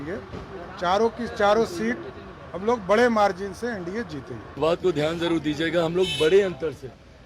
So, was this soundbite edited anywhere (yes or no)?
yes